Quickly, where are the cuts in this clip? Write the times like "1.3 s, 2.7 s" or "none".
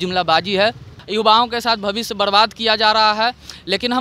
0.9 s